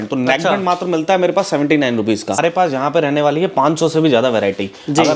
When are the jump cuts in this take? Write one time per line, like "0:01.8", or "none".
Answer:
0:02.4